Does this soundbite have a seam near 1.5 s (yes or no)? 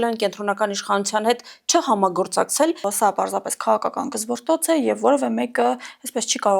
no